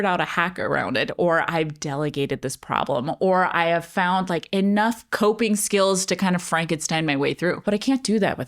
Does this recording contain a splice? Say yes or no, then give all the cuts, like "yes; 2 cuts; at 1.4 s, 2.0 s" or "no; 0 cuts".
yes; 1 cut; at 7.6 s